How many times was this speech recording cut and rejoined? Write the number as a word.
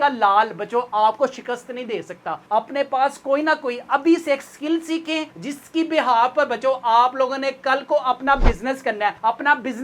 zero